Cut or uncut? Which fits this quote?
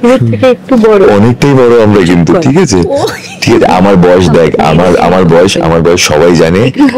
uncut